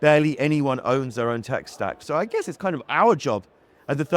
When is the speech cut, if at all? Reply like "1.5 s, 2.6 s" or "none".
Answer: 2.0 s